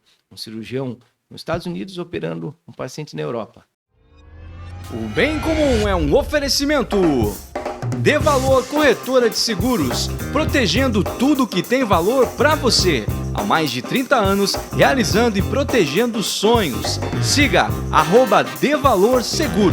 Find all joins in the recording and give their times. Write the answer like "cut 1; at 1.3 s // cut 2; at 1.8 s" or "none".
cut 1; at 3.7 s